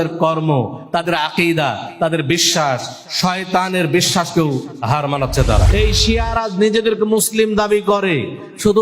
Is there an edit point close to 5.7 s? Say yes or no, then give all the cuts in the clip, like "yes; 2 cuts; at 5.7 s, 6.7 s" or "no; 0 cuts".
yes; 1 cut; at 5.7 s